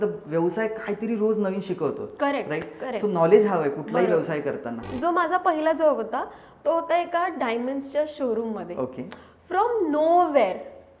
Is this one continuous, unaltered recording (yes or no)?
no